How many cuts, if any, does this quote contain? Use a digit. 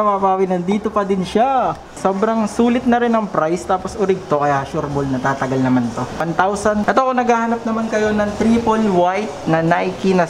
2